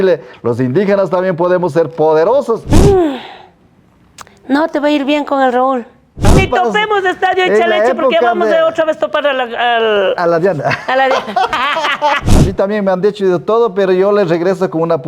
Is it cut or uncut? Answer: cut